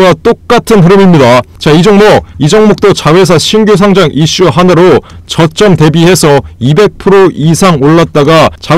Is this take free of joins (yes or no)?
no